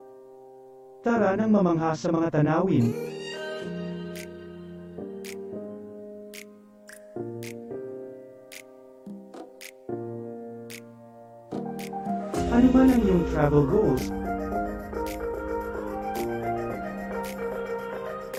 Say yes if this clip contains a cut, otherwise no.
no